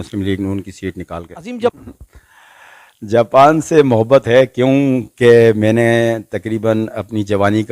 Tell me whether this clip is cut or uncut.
cut